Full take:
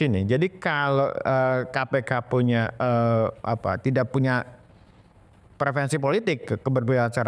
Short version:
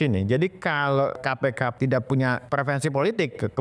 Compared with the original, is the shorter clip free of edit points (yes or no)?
no